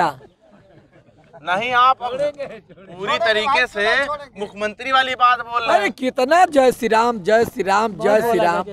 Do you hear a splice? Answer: no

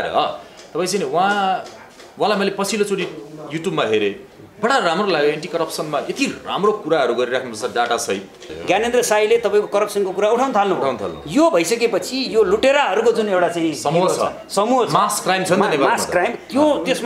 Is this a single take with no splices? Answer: no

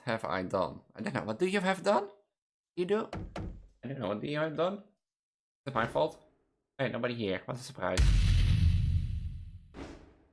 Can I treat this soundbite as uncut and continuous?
yes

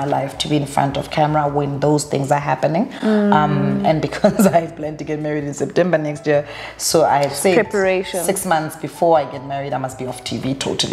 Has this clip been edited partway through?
no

